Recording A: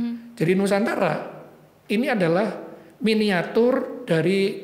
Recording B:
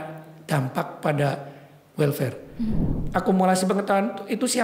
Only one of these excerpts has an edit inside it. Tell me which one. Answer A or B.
B